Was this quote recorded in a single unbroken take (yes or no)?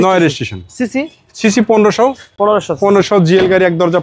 yes